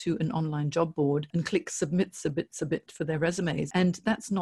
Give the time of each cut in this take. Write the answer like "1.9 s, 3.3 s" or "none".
1.3 s, 3.7 s